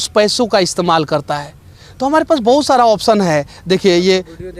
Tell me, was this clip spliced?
no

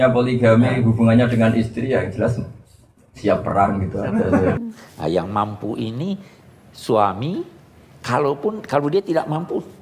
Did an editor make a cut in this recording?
yes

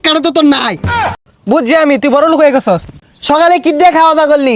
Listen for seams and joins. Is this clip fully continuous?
no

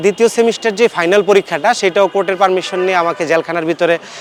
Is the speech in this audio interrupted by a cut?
no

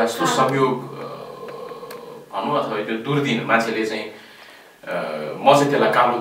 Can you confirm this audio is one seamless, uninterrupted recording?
yes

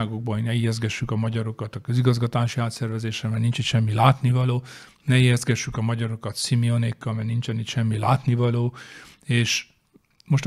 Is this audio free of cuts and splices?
yes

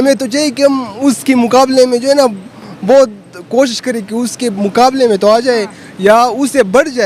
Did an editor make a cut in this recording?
no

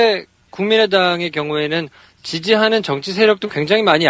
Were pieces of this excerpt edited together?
yes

